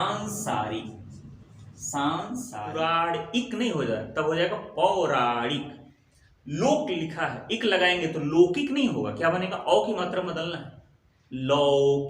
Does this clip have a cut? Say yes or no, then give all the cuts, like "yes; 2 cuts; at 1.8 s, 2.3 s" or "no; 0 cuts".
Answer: yes; 1 cut; at 2.5 s